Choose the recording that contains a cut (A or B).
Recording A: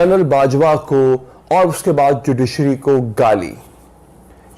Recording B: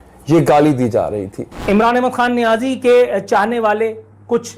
B